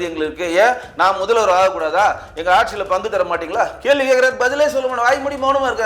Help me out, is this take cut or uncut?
uncut